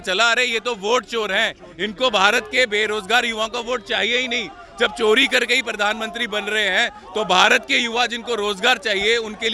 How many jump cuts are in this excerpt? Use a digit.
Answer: 0